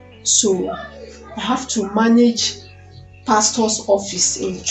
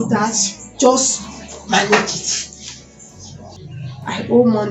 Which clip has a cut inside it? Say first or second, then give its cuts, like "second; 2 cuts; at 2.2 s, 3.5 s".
second; 1 cut; at 3.6 s